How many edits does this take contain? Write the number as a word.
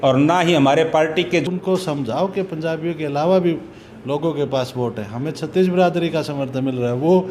one